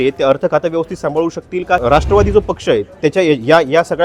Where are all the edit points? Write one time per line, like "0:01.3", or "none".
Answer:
0:01.8